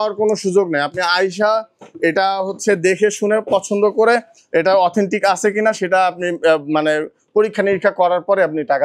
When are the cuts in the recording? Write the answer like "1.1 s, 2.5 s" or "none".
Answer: none